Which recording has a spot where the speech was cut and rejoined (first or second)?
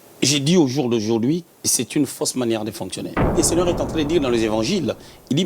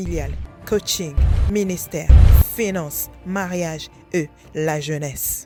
first